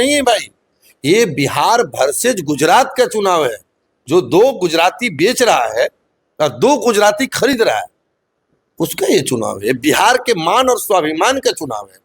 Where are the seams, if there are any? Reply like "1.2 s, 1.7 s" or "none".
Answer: none